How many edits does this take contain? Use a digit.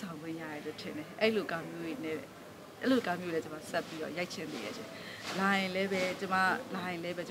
0